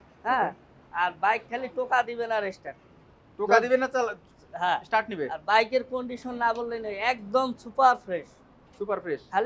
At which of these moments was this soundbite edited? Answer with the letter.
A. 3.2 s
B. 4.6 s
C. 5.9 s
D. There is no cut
D